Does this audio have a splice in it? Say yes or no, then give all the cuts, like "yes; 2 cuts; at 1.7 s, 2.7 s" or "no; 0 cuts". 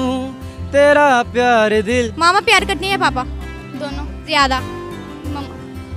yes; 1 cut; at 2.1 s